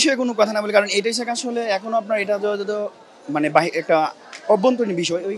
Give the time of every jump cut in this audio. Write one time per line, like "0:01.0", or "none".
none